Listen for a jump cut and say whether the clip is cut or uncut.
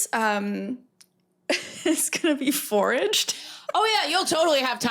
cut